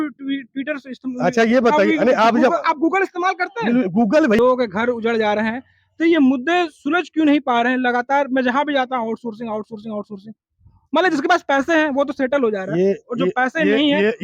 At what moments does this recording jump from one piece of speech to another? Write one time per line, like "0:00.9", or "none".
0:04.4